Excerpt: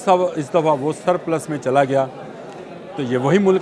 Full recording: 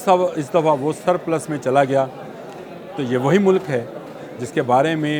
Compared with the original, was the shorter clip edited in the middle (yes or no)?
no